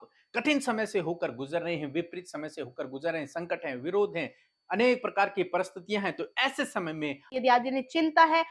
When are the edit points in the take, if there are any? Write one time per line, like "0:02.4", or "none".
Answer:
0:07.4